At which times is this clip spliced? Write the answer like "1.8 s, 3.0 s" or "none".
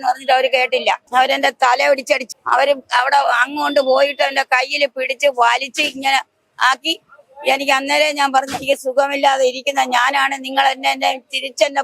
1.0 s, 2.3 s